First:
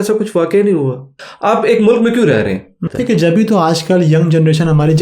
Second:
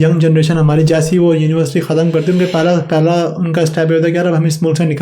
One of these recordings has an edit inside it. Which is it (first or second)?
first